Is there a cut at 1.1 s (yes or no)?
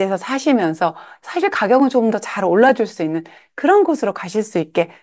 yes